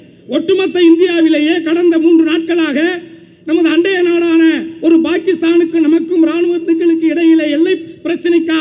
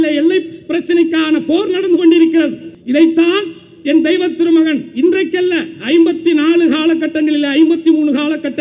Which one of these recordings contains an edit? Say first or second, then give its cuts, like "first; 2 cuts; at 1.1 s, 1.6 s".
second; 1 cut; at 2.7 s